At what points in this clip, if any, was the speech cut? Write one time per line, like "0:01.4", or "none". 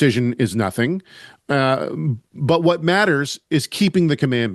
none